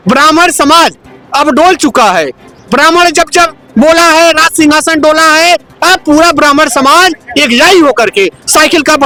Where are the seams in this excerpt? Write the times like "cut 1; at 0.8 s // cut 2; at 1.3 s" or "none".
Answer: none